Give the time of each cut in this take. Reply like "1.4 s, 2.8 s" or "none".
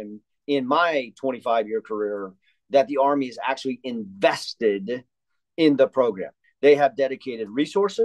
none